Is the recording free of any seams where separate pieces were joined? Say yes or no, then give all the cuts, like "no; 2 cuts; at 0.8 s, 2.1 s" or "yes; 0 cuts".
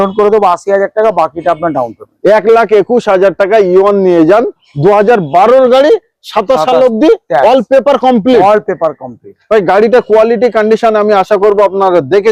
yes; 0 cuts